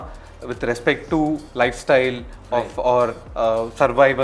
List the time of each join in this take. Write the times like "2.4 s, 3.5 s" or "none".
1.5 s